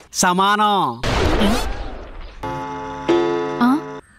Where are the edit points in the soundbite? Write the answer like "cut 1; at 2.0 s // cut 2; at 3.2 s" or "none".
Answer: cut 1; at 2.5 s

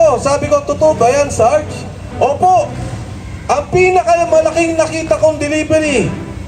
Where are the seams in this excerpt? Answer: none

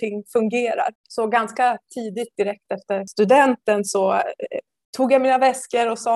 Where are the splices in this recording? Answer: cut 1; at 1.0 s // cut 2; at 3.1 s

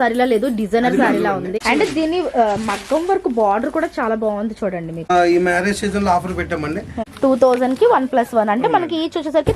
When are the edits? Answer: cut 1; at 1.5 s // cut 2; at 5.1 s // cut 3; at 7.0 s

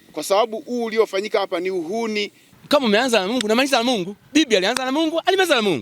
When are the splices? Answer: cut 1; at 2.4 s

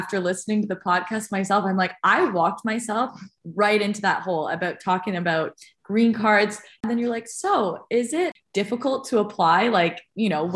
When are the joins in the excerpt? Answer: cut 1; at 6.8 s // cut 2; at 8.4 s

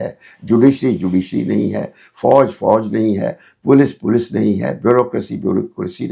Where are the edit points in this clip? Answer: none

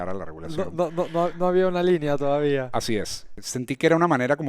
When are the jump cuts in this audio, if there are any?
cut 1; at 3.3 s

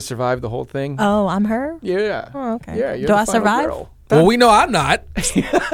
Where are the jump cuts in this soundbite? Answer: cut 1; at 4.1 s

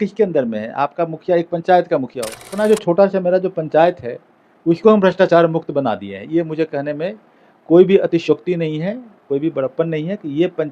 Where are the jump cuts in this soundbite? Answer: cut 1; at 2.5 s

